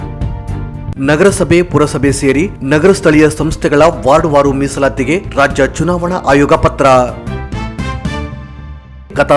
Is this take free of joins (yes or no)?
no